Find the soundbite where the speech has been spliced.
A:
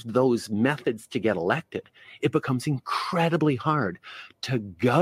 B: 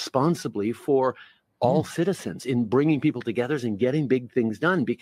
B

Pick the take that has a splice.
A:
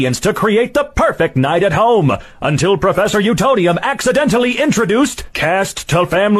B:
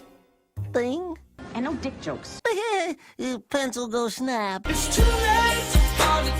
B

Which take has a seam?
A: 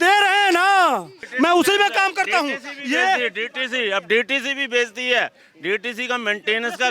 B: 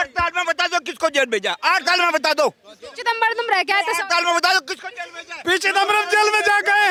A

